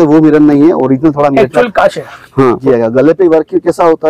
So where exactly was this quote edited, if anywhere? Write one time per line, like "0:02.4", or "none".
0:02.6